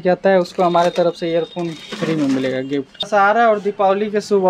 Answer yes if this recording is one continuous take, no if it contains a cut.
no